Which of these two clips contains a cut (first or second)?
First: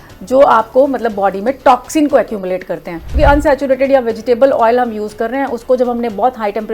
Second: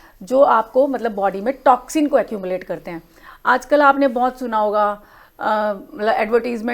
first